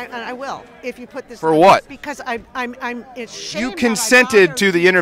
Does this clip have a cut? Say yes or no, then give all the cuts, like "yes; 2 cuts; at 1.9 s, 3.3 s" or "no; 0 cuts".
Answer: no; 0 cuts